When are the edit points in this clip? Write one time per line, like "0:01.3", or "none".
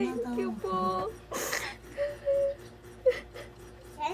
none